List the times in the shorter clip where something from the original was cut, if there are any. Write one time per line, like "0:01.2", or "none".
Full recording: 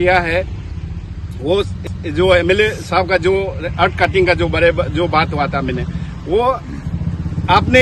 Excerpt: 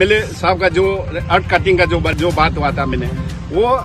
0:02.1